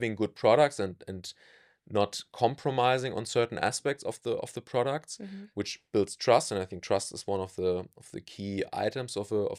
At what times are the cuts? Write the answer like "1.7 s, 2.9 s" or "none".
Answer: none